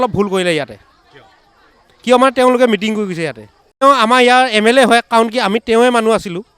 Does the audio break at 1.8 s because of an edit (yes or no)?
no